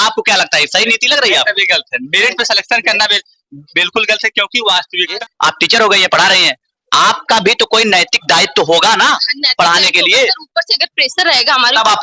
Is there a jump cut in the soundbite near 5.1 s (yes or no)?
yes